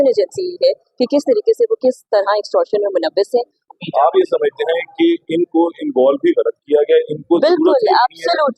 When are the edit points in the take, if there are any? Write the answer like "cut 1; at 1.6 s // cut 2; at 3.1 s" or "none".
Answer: cut 1; at 3.6 s